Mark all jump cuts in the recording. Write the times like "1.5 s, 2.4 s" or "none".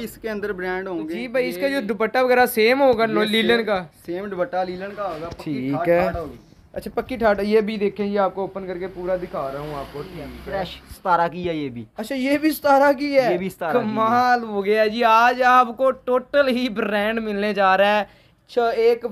1.2 s, 10.4 s